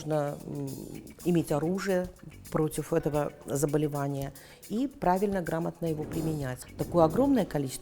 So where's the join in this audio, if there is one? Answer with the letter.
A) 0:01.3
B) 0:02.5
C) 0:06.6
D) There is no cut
C